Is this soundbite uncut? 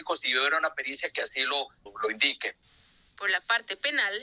no; 1 cut; at 1.9 s

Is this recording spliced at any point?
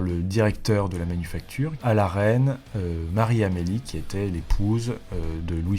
yes; 1 cut; at 1.8 s

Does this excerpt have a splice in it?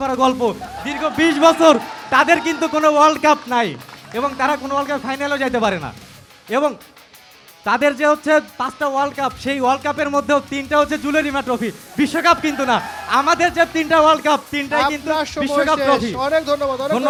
no; 0 cuts

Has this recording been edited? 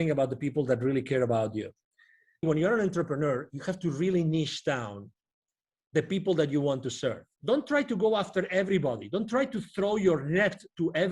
yes; 2 cuts; at 2.4 s, 7.3 s

